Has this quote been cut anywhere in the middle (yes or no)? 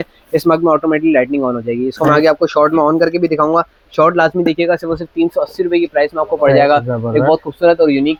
no